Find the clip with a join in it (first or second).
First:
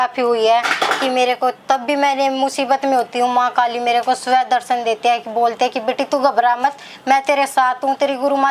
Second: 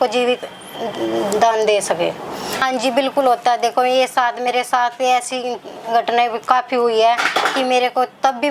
second